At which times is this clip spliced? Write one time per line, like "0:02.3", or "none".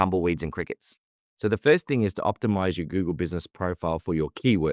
0:01.1